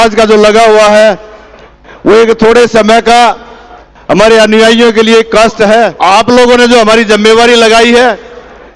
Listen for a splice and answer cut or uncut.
cut